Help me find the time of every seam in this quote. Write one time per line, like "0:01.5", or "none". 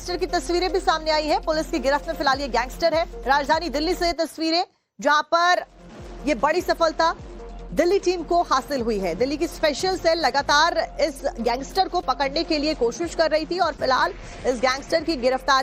none